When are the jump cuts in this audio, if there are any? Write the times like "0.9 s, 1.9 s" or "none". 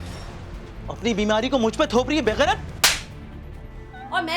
none